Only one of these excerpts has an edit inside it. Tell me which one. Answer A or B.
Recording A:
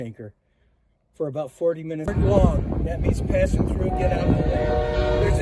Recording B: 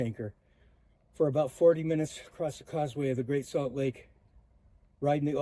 A